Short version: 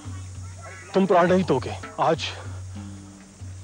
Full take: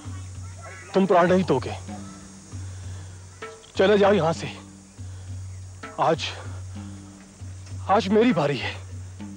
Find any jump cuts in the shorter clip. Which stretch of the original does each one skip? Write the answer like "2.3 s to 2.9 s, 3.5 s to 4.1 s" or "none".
1.8 s to 5.8 s